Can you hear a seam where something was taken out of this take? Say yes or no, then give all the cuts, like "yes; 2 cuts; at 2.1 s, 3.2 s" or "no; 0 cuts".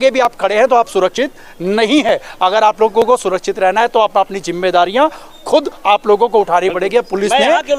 no; 0 cuts